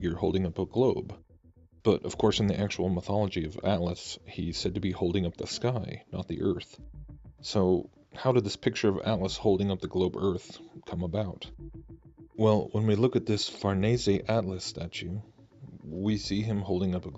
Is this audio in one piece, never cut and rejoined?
yes; 0 cuts

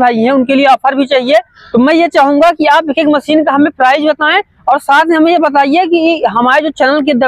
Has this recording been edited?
no; 0 cuts

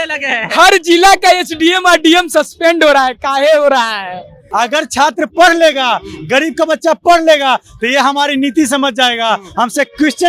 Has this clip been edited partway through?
yes; 1 cut; at 4.4 s

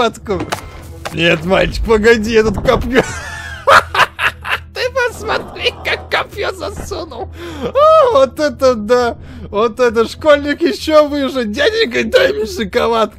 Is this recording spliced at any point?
no; 0 cuts

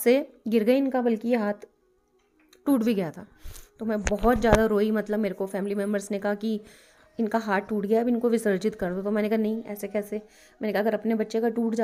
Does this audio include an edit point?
no; 0 cuts

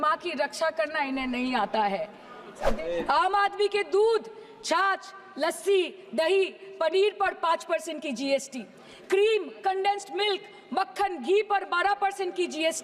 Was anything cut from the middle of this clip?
yes; 1 cut; at 2.6 s

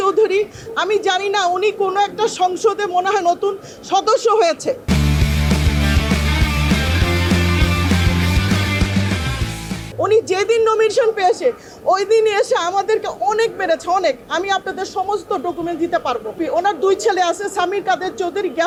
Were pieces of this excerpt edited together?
no; 0 cuts

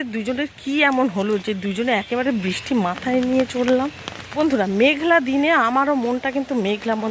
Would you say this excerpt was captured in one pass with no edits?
no; 1 cut; at 4.4 s

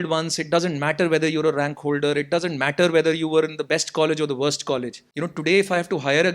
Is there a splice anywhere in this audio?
yes; 1 cut; at 5.0 s

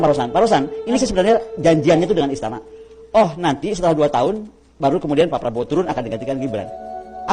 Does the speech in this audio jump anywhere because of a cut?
yes; 1 cut; at 1.0 s

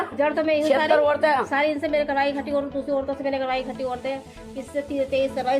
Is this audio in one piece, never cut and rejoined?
yes; 0 cuts

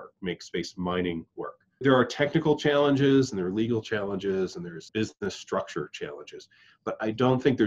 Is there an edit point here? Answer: yes; 2 cuts; at 1.8 s, 4.9 s

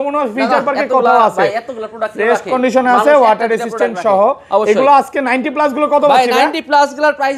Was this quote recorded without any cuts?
yes; 0 cuts

